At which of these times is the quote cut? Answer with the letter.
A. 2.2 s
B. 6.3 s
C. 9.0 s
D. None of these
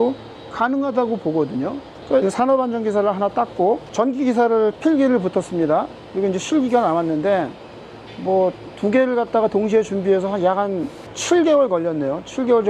A